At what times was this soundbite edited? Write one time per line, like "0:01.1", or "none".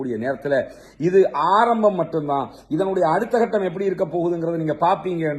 none